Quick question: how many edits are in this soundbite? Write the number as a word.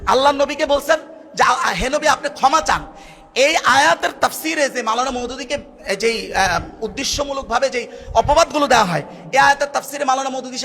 zero